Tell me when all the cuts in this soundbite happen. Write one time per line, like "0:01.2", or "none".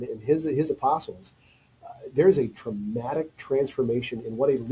none